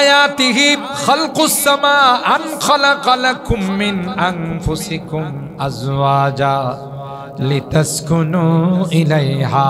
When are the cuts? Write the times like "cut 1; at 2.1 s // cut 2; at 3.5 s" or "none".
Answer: cut 1; at 0.9 s